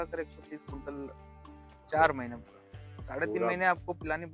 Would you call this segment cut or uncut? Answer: cut